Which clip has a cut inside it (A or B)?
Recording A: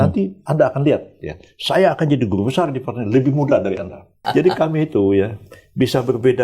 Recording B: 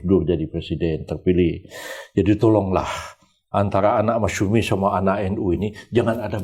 A